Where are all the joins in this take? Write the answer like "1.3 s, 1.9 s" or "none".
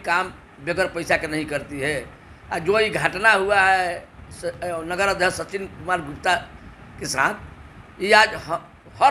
none